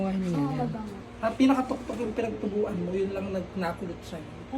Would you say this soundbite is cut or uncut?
cut